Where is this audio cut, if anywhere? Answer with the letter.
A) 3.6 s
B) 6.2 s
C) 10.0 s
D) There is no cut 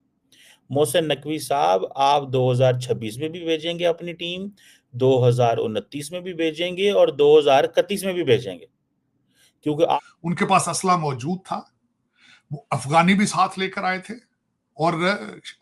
C